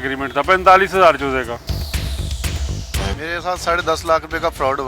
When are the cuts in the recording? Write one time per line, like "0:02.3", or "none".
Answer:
0:03.0